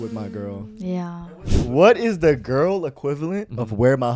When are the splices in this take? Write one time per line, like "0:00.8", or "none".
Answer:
0:01.1